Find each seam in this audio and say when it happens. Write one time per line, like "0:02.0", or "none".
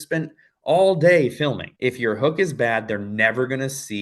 0:01.7